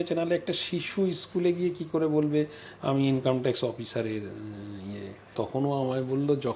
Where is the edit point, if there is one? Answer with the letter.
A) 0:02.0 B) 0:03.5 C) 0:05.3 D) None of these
C